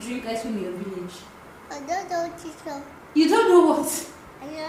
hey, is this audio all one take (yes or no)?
yes